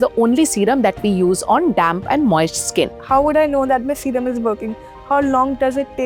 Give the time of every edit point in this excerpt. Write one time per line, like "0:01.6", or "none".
0:03.0

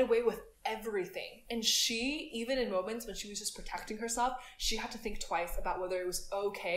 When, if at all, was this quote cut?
none

